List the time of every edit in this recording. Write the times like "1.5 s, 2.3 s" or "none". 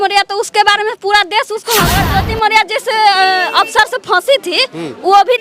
2.0 s